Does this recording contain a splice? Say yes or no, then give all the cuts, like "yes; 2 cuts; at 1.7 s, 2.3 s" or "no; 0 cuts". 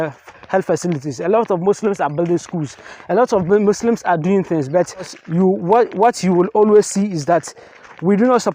yes; 1 cut; at 5.2 s